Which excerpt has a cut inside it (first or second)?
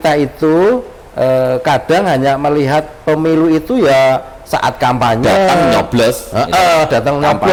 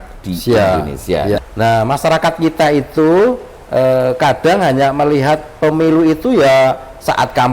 second